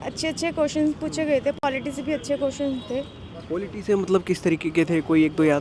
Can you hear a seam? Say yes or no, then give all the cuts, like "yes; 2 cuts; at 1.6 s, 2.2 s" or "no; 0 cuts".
no; 0 cuts